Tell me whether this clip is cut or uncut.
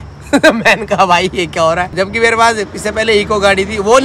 cut